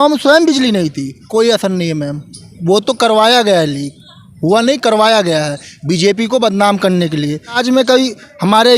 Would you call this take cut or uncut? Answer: cut